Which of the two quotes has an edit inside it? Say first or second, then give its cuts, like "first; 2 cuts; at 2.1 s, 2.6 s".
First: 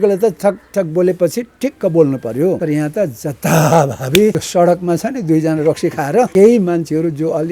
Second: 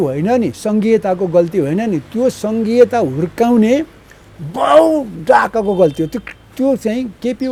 first; 3 cuts; at 2.6 s, 4.4 s, 6.3 s